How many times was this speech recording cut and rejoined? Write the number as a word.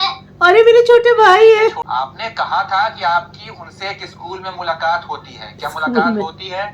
one